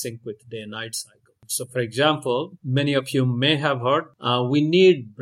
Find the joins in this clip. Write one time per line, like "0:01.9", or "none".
0:01.5
0:02.6
0:04.1

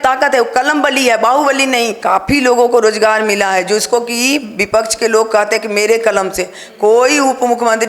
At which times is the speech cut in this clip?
0:02.0

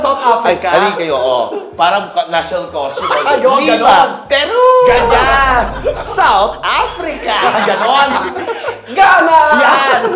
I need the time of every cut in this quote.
none

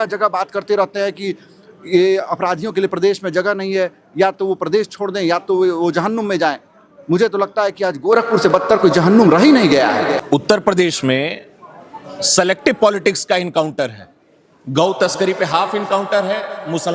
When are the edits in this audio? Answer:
0:10.1

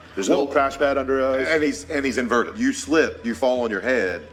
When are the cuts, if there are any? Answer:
none

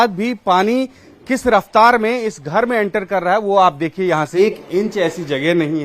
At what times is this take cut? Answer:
0:04.3

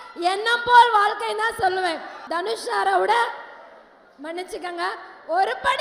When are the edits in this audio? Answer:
0:02.1

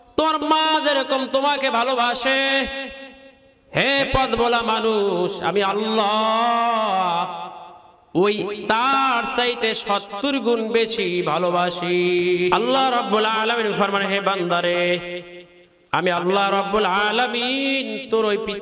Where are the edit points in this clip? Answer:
0:12.5

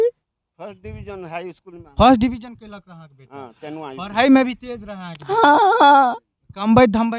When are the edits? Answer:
none

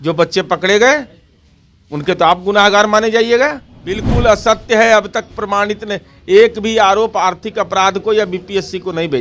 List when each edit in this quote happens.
0:04.1

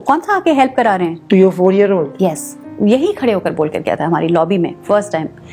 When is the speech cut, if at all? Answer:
0:02.7

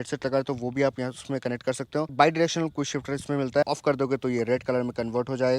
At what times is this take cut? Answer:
0:02.1
0:03.6

